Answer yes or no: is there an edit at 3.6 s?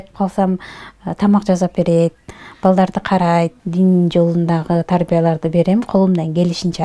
yes